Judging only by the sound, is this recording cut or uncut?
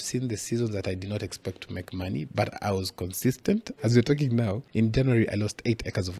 cut